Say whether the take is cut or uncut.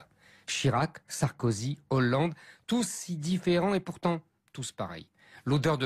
cut